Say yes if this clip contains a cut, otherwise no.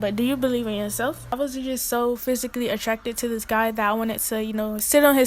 yes